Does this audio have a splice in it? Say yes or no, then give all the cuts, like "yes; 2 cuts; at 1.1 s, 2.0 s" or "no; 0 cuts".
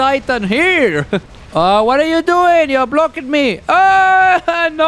yes; 1 cut; at 1.3 s